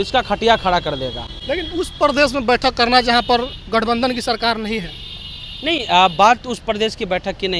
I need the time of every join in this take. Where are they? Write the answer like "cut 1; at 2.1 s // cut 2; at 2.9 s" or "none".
none